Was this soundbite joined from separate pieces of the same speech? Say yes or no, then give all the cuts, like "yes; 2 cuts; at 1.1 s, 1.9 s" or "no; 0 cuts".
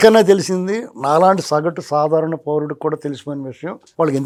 no; 0 cuts